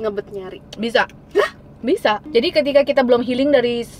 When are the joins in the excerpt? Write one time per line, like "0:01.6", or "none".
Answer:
0:02.2